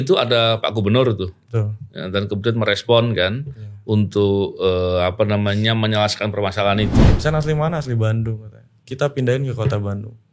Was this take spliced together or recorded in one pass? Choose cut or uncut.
cut